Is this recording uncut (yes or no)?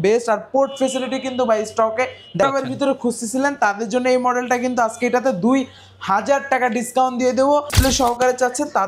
no